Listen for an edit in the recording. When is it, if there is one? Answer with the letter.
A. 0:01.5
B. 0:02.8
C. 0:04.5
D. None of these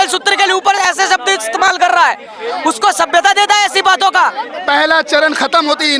C